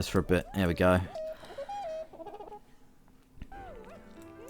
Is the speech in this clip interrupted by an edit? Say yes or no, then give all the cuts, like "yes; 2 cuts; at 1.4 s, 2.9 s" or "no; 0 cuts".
yes; 2 cuts; at 1.2 s, 3.5 s